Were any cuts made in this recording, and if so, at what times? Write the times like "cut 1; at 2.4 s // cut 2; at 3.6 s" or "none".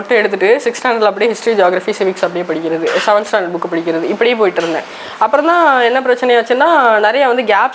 none